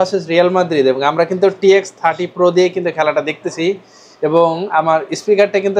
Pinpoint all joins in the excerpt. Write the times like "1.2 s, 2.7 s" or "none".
none